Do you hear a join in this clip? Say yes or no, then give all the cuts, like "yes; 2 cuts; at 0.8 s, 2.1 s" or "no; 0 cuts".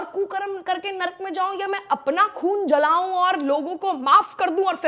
no; 0 cuts